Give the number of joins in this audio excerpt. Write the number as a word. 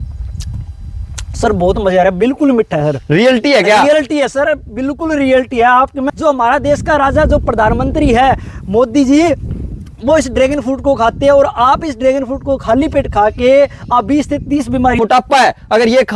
two